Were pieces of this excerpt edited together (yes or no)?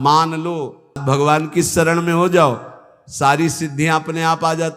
yes